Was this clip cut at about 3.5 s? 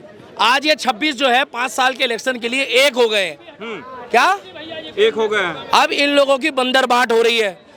no; 0 cuts

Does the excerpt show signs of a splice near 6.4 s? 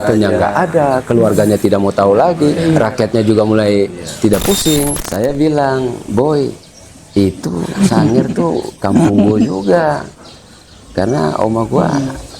no; 1 cut; at 5.0 s

